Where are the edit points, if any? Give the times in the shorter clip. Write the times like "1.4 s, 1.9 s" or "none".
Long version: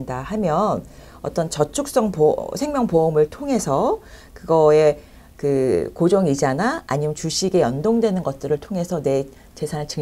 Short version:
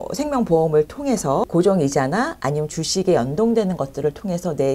1.4 s